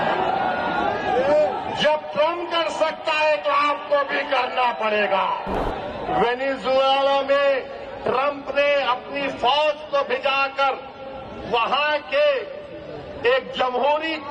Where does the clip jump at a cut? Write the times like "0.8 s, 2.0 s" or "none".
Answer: 5.5 s